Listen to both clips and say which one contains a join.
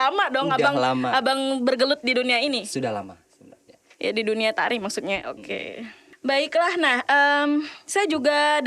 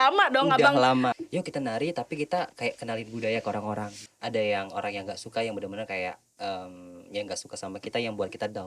second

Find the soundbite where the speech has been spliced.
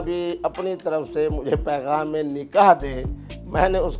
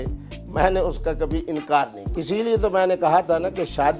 second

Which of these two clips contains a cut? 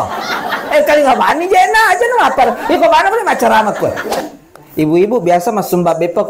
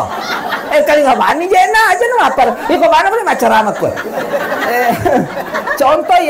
first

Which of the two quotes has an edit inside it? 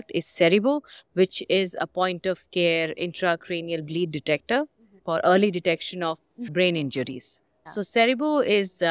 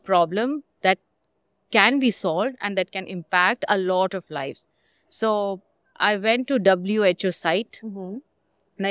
first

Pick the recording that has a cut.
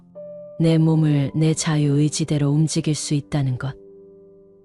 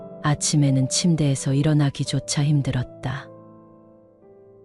first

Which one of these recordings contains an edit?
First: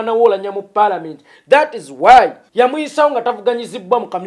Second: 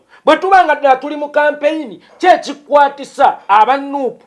first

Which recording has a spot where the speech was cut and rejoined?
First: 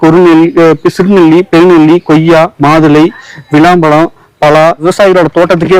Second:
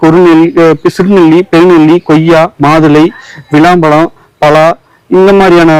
first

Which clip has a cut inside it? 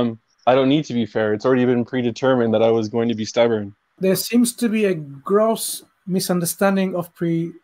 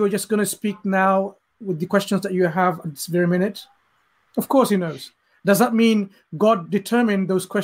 first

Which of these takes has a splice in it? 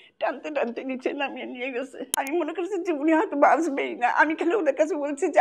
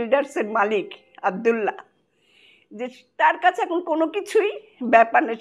first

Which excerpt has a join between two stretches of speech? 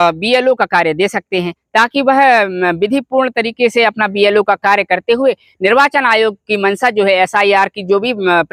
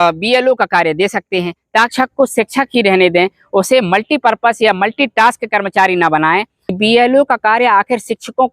second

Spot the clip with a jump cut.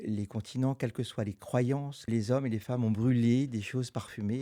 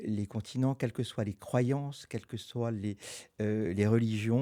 first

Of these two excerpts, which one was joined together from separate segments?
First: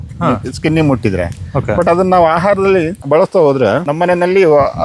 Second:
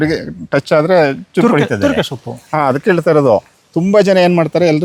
first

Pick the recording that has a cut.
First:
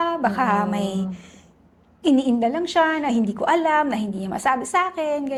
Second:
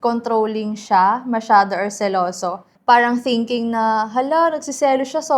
second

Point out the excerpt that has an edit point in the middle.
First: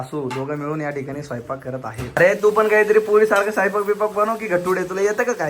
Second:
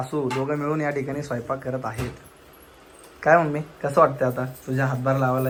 first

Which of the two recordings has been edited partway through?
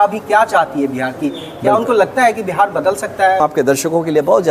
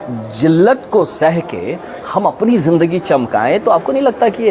first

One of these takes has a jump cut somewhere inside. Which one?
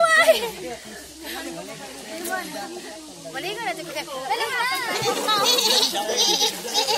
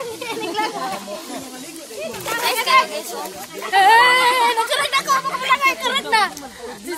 first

